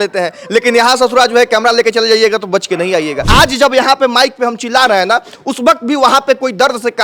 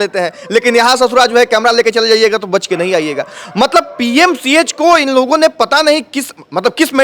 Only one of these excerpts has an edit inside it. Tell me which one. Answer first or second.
first